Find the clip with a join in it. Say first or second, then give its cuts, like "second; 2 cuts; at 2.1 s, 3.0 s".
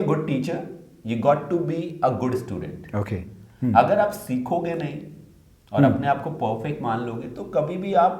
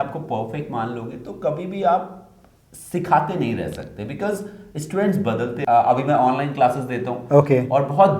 second; 1 cut; at 5.6 s